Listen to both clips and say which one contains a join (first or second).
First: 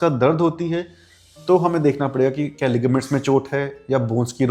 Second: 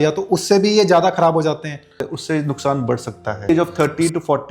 second